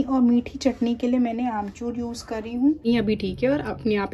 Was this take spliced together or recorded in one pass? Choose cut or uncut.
cut